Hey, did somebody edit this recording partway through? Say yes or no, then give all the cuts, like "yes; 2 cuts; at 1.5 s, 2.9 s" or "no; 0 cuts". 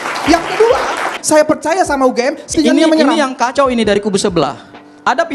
yes; 2 cuts; at 1.2 s, 2.5 s